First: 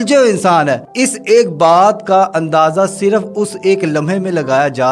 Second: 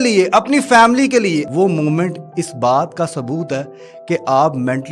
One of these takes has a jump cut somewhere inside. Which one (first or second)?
second